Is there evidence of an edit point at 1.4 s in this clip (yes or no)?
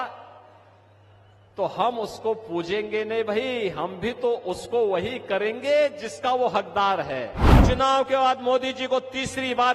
no